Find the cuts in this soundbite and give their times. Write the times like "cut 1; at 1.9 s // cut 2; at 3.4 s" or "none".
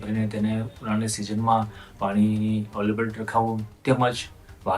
cut 1; at 3.7 s